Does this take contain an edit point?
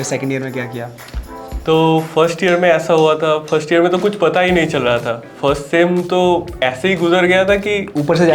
no; 0 cuts

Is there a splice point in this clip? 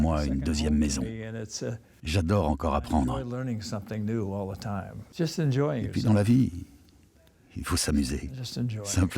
yes; 2 cuts; at 2.0 s, 5.0 s

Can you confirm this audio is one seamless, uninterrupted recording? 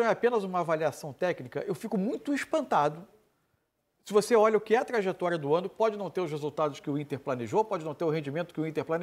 yes; 0 cuts

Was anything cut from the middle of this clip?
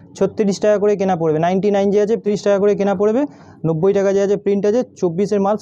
yes; 1 cut; at 2.2 s

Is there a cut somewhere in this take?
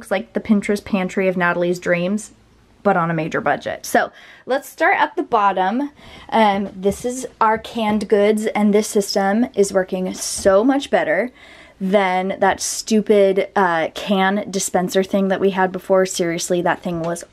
no; 0 cuts

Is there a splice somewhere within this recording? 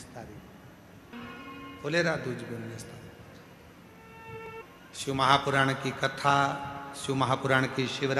yes; 2 cuts; at 1.1 s, 4.5 s

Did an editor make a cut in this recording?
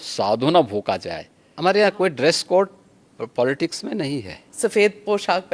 yes; 2 cuts; at 1.5 s, 4.5 s

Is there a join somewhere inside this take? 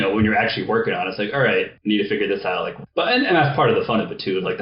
yes; 2 cuts; at 1.7 s, 2.8 s

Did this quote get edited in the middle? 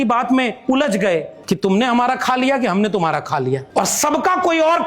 yes; 2 cuts; at 1.3 s, 3.7 s

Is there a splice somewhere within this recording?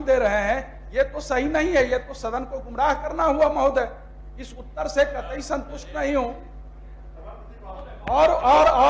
no; 0 cuts

